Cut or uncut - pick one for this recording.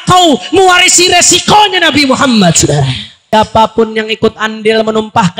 cut